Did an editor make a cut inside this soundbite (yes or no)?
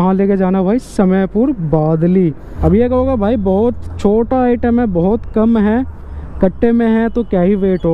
yes